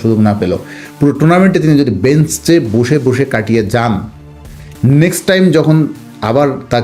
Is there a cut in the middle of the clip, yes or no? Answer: no